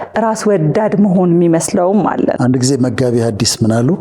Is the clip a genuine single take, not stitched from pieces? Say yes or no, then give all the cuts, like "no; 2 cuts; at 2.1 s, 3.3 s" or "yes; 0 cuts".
no; 1 cut; at 2.4 s